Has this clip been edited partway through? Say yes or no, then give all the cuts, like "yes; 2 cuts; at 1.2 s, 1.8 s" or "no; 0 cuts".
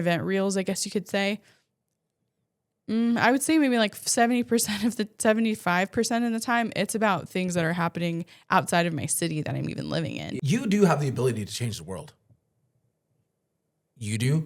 yes; 1 cut; at 10.3 s